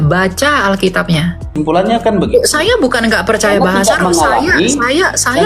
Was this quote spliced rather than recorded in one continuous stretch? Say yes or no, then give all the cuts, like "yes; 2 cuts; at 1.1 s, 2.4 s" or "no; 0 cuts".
yes; 1 cut; at 1.4 s